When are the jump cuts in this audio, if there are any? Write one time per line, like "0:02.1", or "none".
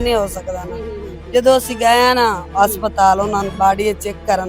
0:01.1